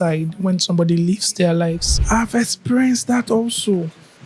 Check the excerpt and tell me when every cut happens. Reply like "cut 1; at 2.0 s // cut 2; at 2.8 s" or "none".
cut 1; at 1.9 s